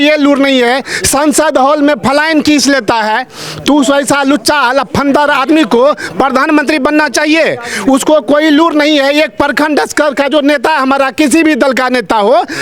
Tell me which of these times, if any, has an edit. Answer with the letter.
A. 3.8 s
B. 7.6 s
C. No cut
C